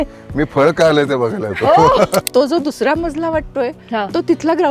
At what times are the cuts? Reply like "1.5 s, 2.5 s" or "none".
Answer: 2.3 s